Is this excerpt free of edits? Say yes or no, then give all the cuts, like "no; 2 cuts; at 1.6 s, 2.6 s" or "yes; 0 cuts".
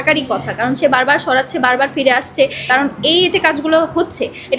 no; 1 cut; at 2.6 s